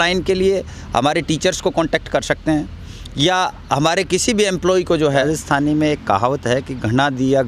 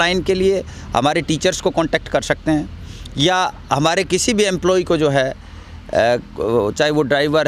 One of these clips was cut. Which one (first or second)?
first